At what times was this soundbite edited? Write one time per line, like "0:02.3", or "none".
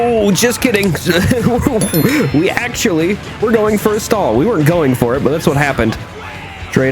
0:06.0